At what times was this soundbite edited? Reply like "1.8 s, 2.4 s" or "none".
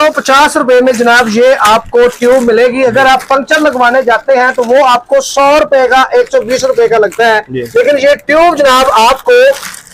none